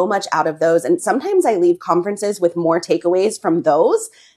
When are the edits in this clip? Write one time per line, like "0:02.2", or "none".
none